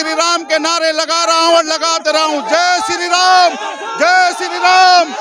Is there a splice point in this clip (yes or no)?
no